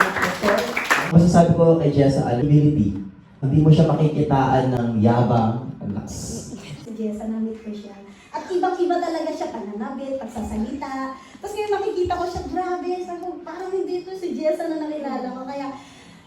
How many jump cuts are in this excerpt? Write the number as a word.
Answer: two